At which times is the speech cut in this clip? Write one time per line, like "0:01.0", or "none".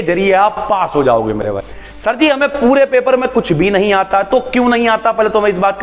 0:01.4